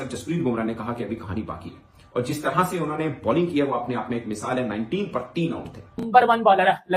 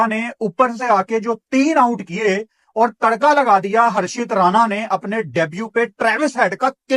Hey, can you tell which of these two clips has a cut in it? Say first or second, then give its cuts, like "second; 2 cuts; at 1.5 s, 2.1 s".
first; 1 cut; at 6.0 s